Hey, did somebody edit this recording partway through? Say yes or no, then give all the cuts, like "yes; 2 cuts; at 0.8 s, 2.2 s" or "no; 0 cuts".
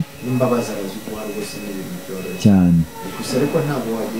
no; 0 cuts